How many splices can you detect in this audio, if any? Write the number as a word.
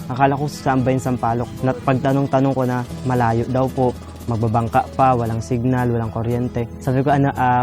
two